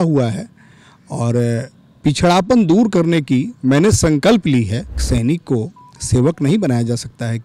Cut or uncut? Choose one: cut